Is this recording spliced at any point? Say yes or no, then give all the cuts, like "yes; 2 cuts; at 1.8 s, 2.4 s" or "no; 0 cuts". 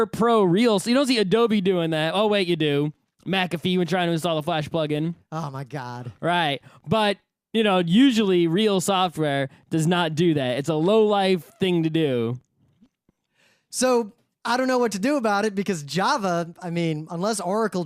yes; 1 cut; at 6.5 s